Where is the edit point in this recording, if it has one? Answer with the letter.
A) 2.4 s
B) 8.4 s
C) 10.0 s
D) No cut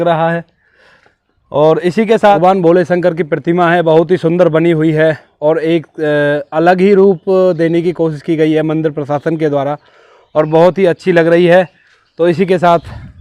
A